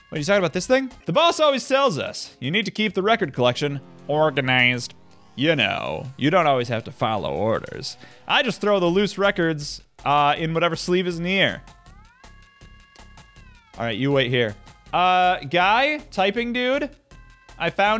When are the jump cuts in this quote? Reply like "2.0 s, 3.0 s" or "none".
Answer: 1.0 s

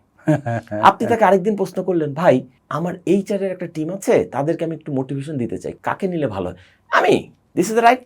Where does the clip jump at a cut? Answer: 2.6 s, 5.8 s

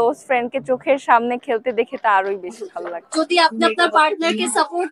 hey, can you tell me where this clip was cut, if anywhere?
3.0 s

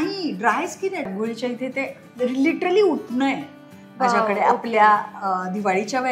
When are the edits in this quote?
1.1 s

